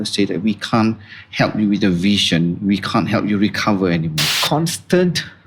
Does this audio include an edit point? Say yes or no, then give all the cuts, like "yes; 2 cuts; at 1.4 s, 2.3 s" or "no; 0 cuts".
no; 0 cuts